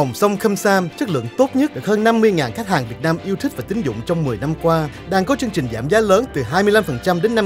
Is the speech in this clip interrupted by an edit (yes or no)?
no